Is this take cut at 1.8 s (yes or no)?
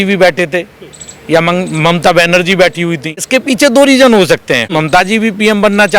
no